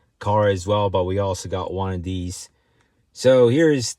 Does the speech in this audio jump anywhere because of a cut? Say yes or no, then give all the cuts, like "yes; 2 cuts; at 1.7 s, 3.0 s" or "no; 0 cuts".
no; 0 cuts